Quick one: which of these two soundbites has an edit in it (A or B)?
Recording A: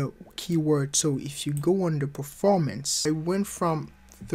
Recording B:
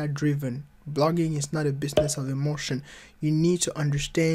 A